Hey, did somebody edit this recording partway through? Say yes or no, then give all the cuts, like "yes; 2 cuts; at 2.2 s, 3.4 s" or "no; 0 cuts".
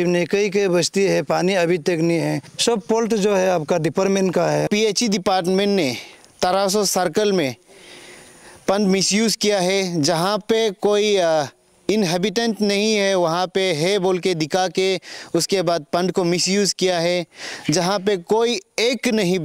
yes; 2 cuts; at 2.5 s, 4.7 s